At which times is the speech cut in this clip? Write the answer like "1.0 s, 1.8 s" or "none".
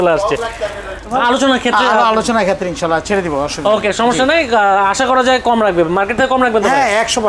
1.0 s